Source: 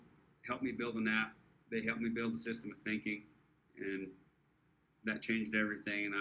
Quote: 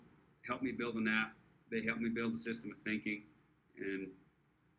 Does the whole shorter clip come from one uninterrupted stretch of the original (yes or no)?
yes